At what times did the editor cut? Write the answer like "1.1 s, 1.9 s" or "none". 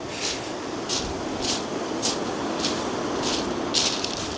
none

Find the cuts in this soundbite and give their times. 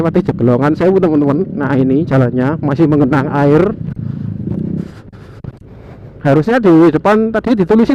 4.8 s

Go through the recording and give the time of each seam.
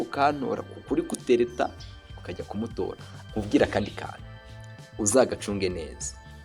3.1 s

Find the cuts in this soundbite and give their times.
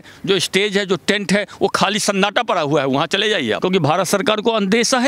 3.6 s

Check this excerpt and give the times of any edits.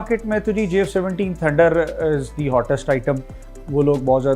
none

